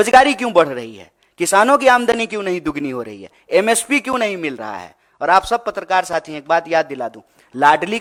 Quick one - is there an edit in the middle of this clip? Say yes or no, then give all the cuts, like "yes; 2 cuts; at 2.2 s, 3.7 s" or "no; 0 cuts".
no; 0 cuts